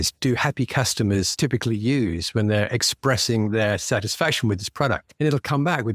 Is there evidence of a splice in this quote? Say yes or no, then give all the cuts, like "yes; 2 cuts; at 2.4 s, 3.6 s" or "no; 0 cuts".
no; 0 cuts